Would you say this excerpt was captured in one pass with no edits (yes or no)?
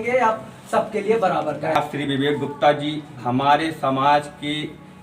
no